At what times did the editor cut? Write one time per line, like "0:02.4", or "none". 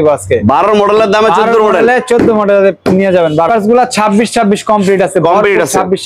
0:03.5